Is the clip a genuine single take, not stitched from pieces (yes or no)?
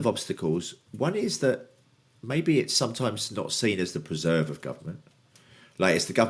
yes